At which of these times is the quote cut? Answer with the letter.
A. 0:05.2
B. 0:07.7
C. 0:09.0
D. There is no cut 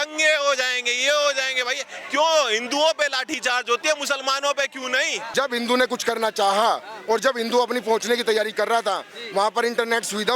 A